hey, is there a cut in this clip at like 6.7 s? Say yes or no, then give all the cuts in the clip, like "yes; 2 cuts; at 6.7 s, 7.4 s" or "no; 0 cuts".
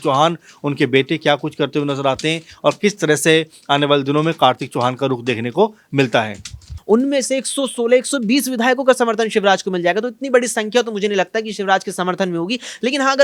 yes; 1 cut; at 6.7 s